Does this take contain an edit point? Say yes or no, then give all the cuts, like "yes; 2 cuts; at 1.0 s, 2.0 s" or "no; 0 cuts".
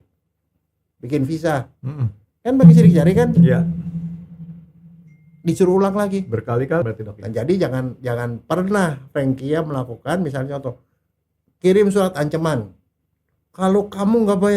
yes; 1 cut; at 6.8 s